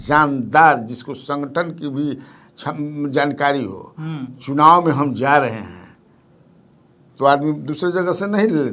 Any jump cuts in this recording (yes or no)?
no